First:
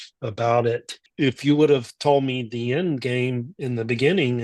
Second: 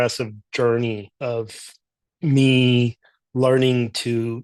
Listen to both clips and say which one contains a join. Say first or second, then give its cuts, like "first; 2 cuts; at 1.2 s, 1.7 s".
first; 1 cut; at 1.0 s